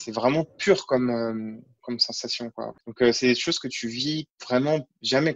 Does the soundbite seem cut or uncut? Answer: cut